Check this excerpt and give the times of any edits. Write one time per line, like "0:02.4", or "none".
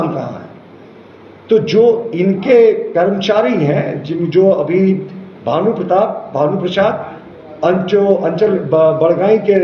none